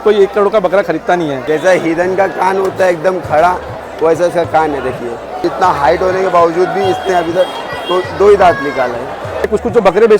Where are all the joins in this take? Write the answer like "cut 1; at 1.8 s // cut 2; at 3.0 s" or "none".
cut 1; at 1.4 s // cut 2; at 5.4 s // cut 3; at 9.5 s